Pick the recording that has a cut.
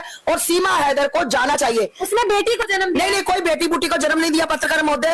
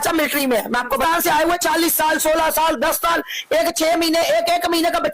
second; 1 cut; at 1.0 s

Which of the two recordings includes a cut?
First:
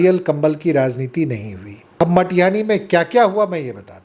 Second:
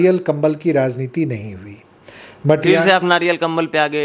first; 1 cut; at 2.0 s

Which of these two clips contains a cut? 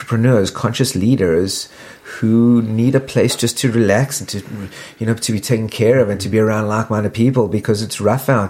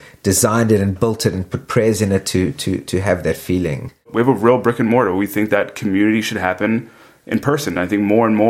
second; 1 cut; at 4.1 s

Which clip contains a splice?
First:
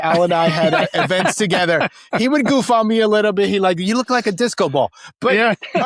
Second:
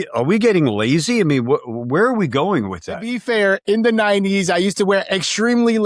second; 1 cut; at 3.1 s

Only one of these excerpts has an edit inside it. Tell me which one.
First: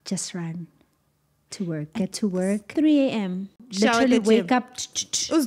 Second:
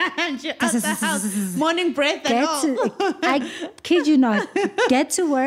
first; 1 cut; at 3.6 s

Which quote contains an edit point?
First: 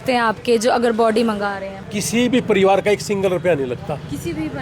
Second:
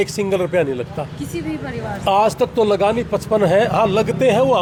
first; 1 cut; at 1.7 s

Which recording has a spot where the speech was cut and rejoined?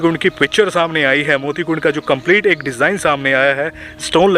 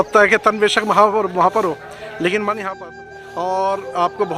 second; 1 cut; at 3.0 s

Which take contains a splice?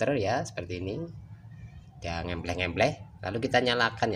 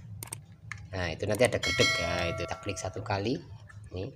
second; 1 cut; at 2.5 s

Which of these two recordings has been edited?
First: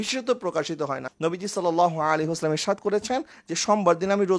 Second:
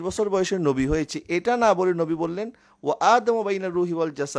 first; 1 cut; at 1.1 s

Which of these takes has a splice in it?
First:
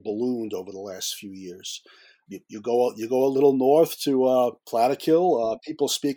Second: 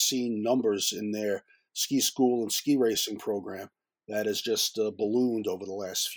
first; 2 cuts; at 2.2 s, 4.6 s

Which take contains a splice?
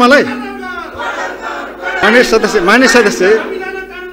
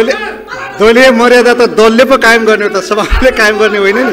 first; 1 cut; at 2.0 s

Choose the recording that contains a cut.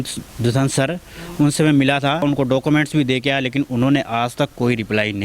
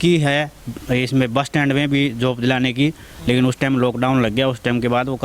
first; 1 cut; at 2.2 s

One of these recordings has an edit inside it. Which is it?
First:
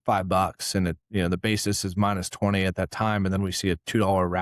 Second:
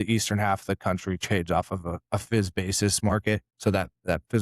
second; 1 cut; at 3.5 s

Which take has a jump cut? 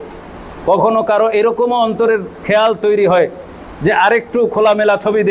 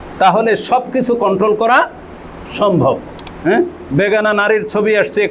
second; 1 cut; at 3.5 s

